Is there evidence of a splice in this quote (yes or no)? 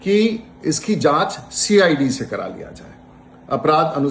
no